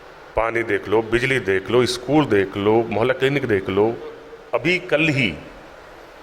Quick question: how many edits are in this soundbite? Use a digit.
1